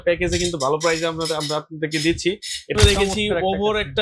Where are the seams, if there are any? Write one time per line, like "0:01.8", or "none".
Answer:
0:02.8